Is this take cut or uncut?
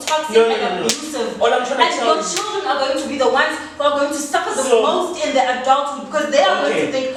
uncut